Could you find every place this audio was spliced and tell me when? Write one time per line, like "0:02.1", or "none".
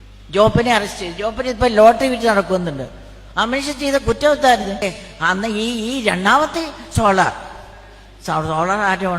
0:04.8